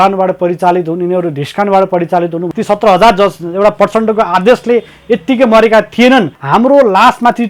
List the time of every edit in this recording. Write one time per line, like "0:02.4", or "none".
0:02.4
0:06.4